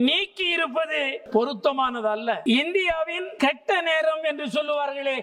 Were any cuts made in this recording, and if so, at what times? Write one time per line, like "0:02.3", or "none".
0:01.2
0:02.4
0:03.2